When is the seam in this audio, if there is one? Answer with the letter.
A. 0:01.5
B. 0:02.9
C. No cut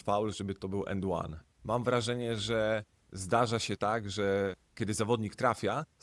A